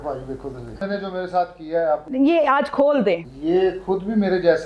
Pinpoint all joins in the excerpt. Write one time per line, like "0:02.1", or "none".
0:00.8
0:02.1
0:03.3